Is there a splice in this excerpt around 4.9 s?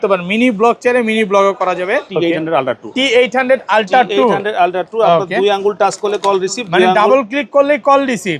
no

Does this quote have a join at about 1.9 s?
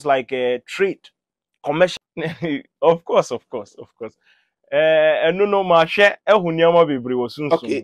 yes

